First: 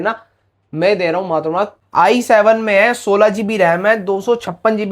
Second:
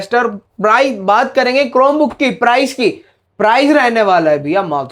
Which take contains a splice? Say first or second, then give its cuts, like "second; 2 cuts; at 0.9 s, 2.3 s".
first; 1 cut; at 1.8 s